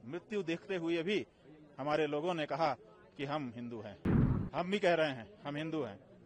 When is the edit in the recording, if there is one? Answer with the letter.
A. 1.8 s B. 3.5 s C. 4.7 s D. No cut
D